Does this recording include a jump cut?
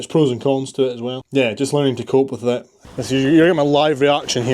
yes; 2 cuts; at 1.2 s, 2.9 s

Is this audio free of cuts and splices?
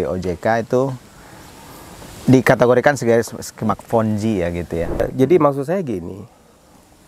no; 1 cut; at 5.0 s

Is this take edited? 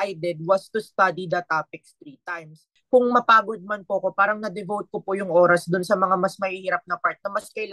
yes; 1 cut; at 2.7 s

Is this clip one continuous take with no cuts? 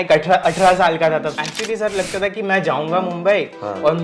no; 1 cut; at 1.4 s

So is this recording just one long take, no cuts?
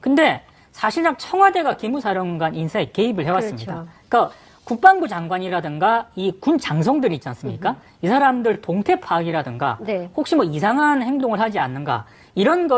no; 1 cut; at 5.6 s

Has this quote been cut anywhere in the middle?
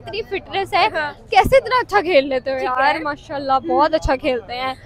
no; 0 cuts

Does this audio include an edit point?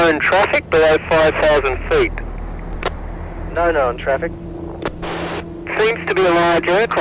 yes; 1 cut; at 5.5 s

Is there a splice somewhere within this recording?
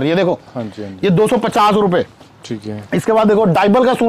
no; 0 cuts

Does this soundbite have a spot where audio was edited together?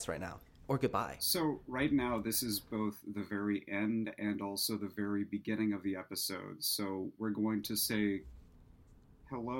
yes; 1 cut; at 1.2 s

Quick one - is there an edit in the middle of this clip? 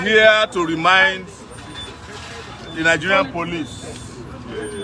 no; 0 cuts

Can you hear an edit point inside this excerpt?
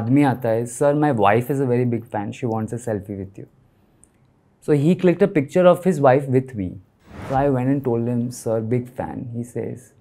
yes; 1 cut; at 7.1 s

